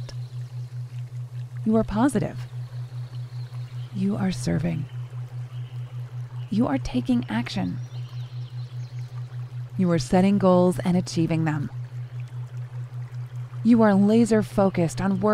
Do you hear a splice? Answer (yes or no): yes